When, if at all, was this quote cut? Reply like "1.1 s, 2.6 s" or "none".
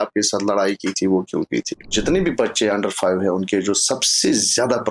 1.9 s